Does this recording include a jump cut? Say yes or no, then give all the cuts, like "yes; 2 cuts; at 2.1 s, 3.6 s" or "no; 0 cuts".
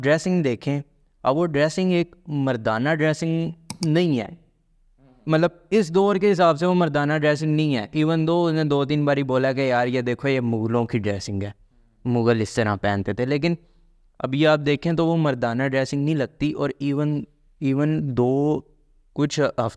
no; 0 cuts